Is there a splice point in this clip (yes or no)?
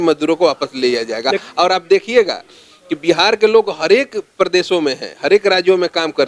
no